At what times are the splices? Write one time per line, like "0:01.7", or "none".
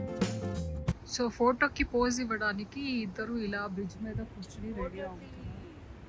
0:01.0